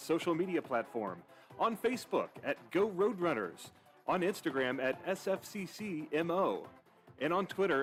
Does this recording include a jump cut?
no; 0 cuts

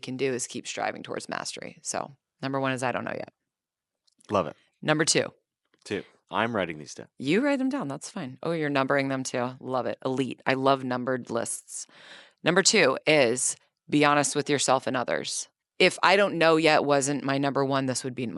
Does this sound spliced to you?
no; 0 cuts

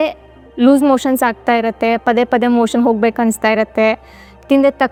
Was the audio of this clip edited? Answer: no; 0 cuts

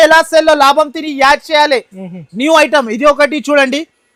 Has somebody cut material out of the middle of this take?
no; 0 cuts

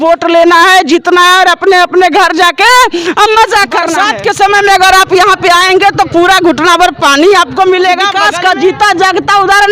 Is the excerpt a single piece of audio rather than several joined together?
no; 2 cuts; at 3.9 s, 8.2 s

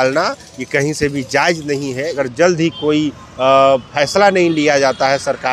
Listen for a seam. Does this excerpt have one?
yes; 1 cut; at 2.2 s

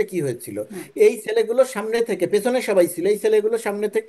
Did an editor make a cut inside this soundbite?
no; 0 cuts

